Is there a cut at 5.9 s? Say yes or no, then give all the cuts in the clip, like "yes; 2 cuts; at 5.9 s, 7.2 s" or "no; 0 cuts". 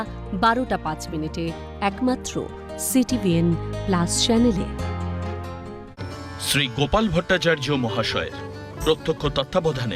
yes; 1 cut; at 5.9 s